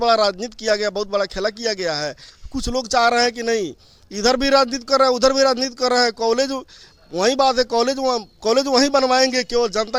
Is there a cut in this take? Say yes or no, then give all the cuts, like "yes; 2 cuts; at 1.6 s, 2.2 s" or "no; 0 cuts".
no; 0 cuts